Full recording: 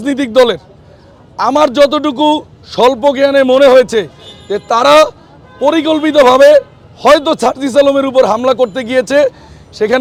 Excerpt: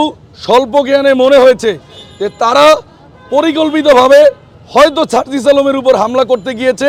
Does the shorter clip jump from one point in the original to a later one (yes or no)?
no